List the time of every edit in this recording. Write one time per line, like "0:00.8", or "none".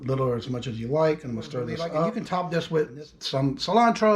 0:02.1